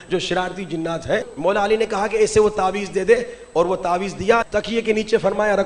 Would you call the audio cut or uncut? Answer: cut